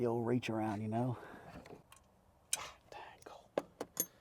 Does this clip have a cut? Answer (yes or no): yes